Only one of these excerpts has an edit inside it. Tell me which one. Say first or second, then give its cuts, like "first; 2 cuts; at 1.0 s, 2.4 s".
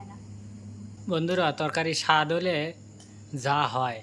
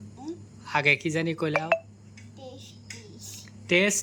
first; 1 cut; at 1.0 s